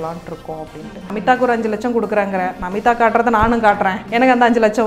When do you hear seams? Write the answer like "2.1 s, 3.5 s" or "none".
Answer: 1.1 s, 4.0 s